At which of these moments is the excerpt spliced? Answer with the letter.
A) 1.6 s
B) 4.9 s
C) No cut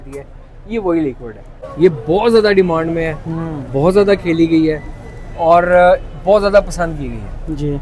A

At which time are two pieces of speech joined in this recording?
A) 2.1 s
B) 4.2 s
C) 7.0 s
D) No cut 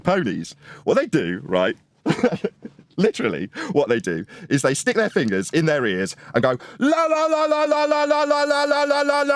D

